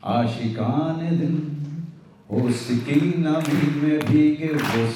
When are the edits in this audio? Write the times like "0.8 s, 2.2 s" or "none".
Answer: none